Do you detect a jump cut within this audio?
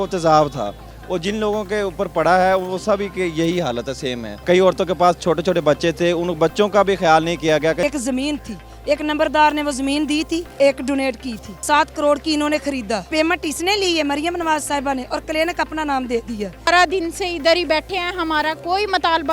yes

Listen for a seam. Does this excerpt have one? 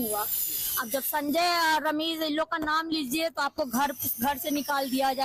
no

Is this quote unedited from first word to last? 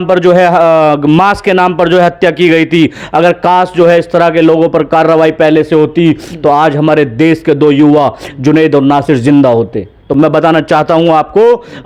yes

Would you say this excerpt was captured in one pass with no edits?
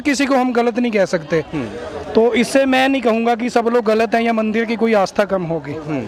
yes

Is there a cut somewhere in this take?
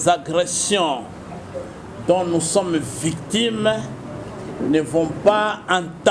no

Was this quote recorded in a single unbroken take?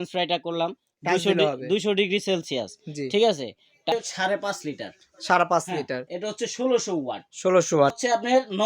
no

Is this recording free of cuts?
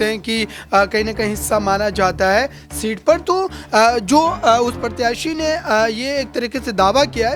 yes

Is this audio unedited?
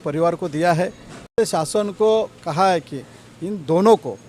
no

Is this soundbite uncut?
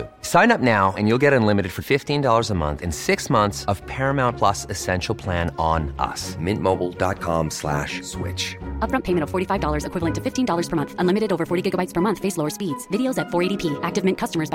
yes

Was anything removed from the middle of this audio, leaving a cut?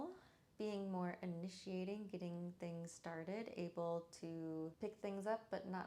yes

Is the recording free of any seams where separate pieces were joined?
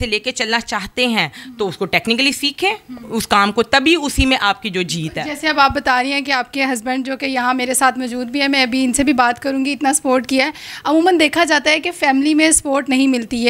yes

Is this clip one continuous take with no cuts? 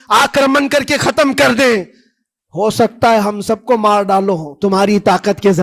yes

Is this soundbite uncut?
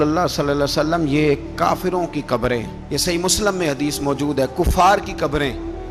yes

